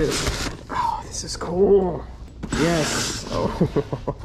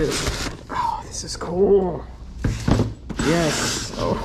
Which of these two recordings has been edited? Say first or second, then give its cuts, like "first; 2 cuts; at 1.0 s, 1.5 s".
first; 1 cut; at 2.3 s